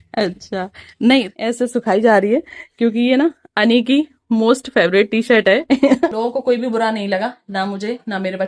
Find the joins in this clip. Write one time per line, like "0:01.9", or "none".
0:01.3
0:06.1